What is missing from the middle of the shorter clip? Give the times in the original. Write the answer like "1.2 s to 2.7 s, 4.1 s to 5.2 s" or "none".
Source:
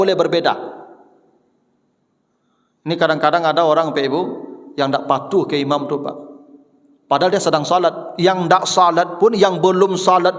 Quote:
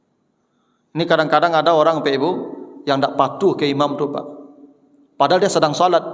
none